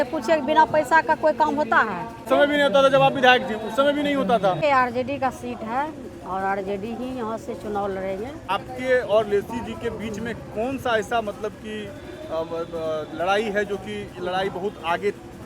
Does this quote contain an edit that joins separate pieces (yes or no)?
yes